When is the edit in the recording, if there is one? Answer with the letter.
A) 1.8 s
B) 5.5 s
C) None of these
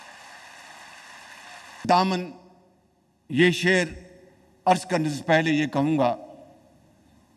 A